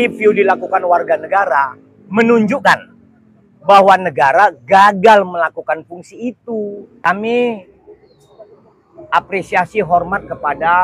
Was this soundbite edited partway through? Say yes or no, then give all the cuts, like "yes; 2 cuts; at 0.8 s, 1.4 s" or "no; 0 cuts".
yes; 1 cut; at 6.9 s